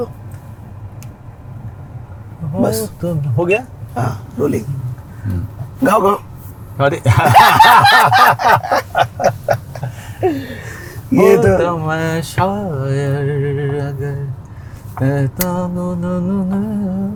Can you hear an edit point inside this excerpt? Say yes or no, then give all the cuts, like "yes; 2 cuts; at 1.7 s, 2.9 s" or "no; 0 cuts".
no; 0 cuts